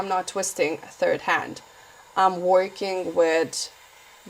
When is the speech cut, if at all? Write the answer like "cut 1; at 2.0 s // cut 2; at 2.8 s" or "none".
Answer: none